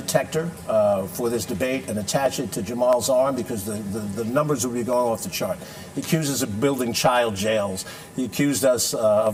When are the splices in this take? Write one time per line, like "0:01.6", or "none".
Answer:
none